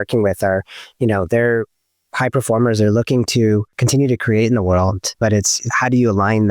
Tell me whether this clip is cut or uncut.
cut